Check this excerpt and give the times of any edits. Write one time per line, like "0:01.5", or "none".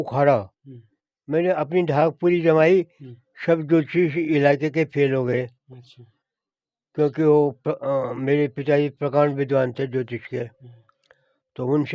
none